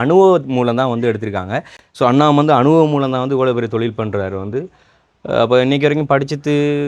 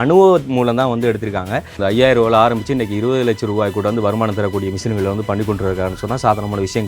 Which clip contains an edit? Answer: second; 1 cut; at 1.8 s

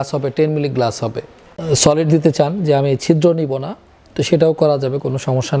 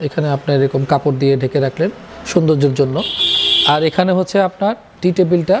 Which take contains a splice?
first; 1 cut; at 1.6 s

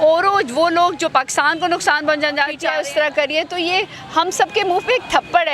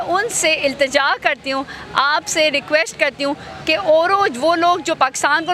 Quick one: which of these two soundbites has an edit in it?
first; 1 cut; at 2.6 s

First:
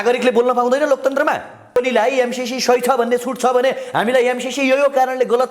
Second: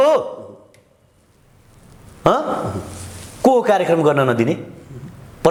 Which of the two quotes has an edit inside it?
first; 1 cut; at 1.8 s

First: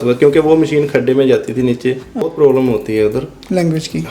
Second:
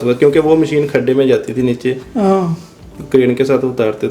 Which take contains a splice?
first; 1 cut; at 2.2 s

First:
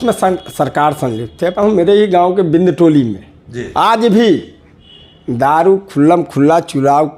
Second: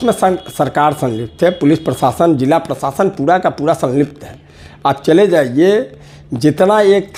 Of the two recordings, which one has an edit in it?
first; 1 cut; at 1.5 s

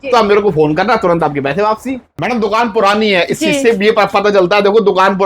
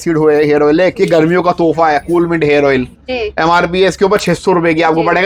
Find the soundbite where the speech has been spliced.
first; 1 cut; at 2.1 s

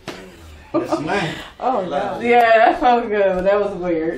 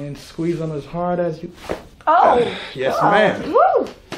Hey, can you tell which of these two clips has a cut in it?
first; 1 cut; at 1.9 s

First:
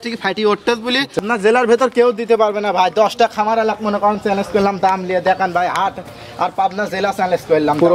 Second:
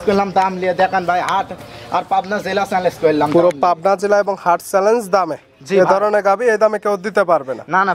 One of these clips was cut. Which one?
first; 1 cut; at 1.2 s

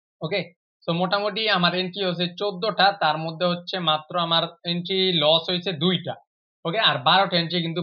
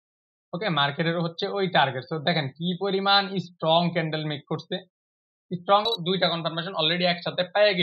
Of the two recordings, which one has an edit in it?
second; 1 cut; at 5.9 s

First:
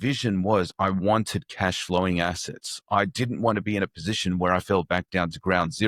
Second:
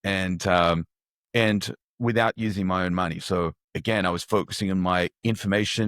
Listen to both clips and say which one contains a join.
second; 1 cut; at 3.7 s

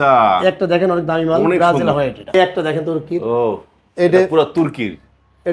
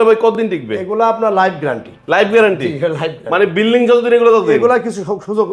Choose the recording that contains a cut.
first; 1 cut; at 2.3 s

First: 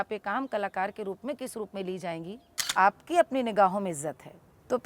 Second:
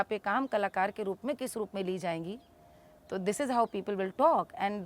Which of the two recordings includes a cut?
first; 1 cut; at 2.7 s

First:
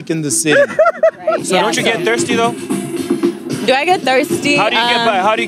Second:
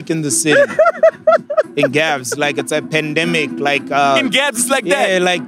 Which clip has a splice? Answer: first; 1 cut; at 1.4 s

